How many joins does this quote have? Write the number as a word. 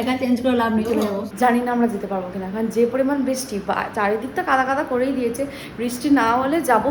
one